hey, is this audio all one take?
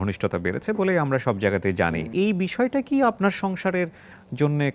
no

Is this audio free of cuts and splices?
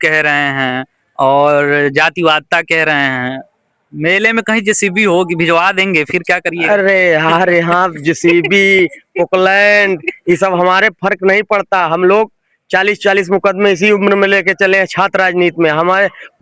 yes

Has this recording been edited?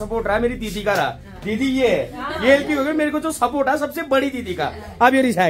no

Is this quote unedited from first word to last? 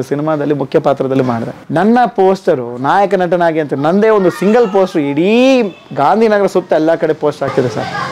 yes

